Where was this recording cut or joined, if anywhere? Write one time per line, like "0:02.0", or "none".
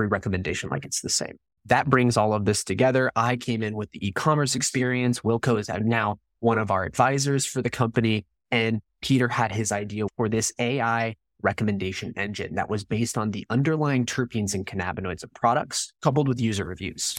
0:01.5
0:10.1
0:15.8